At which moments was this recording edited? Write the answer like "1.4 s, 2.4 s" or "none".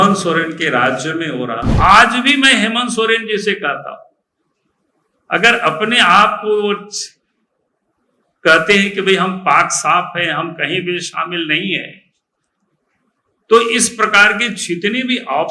1.7 s